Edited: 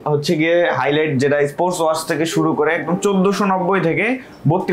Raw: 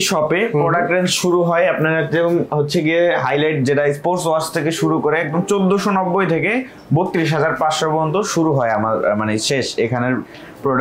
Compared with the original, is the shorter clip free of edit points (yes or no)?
yes